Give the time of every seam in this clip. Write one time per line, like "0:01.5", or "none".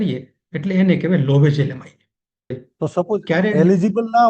0:02.6